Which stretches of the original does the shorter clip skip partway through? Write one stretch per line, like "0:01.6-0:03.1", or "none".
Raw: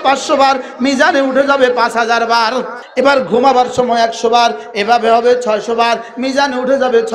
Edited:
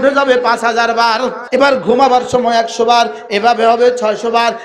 0:02.7-0:02.8

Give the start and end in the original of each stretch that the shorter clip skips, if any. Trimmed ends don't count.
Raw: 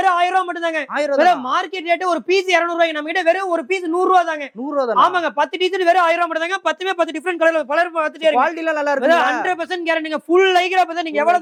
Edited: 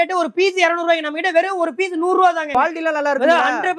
0:04.4-0:08.3

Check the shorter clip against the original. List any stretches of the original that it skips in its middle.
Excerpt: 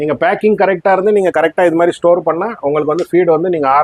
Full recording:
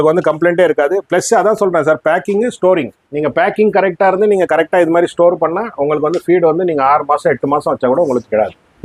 none

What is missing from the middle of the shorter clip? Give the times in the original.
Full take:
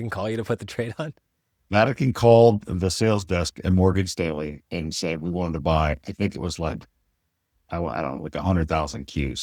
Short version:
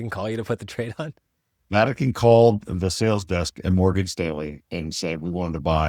none

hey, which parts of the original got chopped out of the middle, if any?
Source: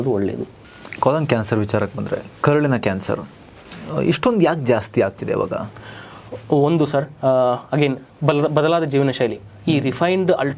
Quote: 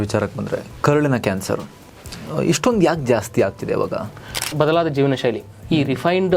0:06.1-0:08.5

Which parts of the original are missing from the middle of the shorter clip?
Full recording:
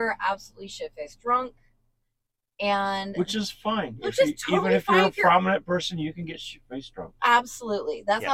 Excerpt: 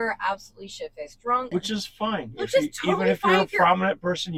0:01.5-0:03.1

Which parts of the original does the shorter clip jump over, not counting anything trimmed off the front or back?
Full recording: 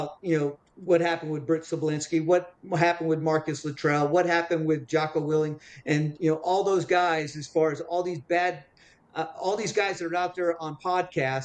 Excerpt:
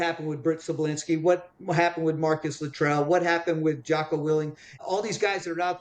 0:05.7-0:09.2

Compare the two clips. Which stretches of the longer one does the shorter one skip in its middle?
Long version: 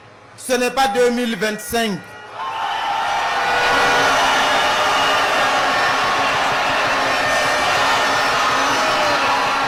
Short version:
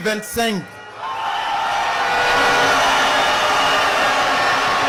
none

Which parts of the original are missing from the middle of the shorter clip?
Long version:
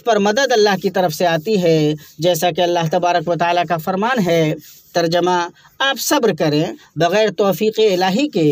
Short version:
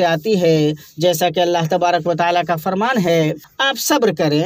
0:04.7-0:05.7

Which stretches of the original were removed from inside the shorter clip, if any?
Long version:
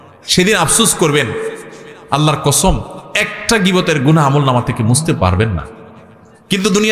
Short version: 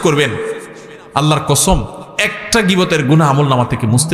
none

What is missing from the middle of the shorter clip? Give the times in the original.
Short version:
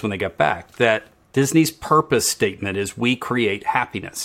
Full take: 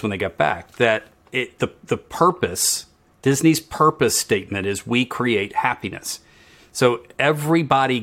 0:01.2-0:03.0

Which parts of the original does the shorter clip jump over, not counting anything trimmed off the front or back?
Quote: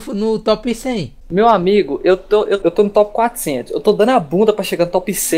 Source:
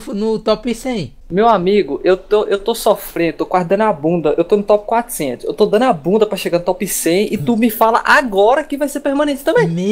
0:02.6-0:04.3

